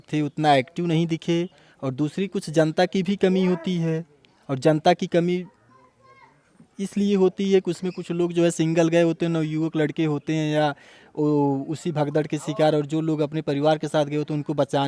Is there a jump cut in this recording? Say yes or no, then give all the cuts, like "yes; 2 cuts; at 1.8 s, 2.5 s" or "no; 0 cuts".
no; 0 cuts